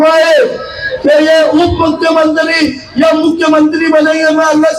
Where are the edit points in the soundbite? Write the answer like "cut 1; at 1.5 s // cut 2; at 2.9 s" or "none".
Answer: none